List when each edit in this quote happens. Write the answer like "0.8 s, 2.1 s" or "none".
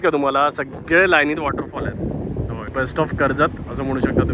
none